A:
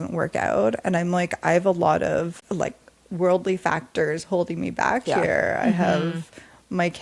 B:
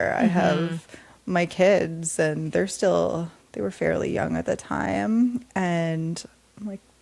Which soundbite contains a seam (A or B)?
A